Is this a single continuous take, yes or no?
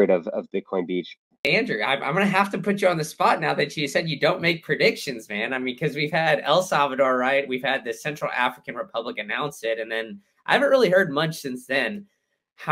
no